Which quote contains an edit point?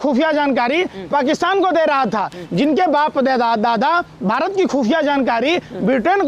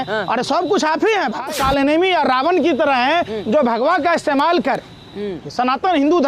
second; 1 cut; at 1.4 s

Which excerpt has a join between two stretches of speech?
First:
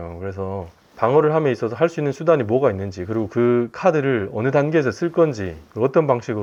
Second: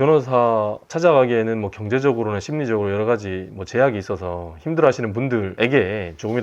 second; 2 cuts; at 0.9 s, 5.5 s

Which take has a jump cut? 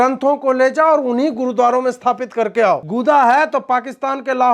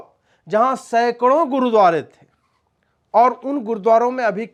first; 1 cut; at 2.9 s

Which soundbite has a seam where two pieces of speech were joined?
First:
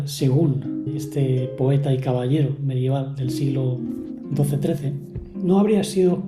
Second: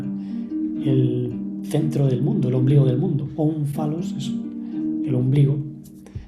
first; 2 cuts; at 0.9 s, 5.3 s

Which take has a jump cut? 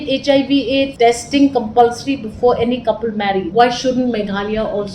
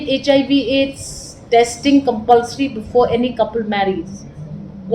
first; 2 cuts; at 0.9 s, 3.5 s

